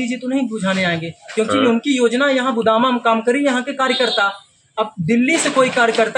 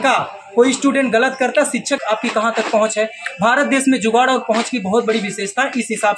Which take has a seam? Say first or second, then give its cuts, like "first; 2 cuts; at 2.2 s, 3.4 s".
second; 1 cut; at 2.0 s